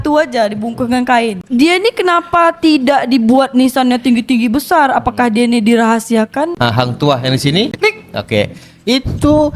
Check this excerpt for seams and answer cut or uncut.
cut